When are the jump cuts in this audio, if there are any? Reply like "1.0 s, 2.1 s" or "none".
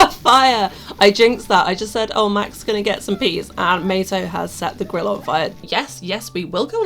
5.6 s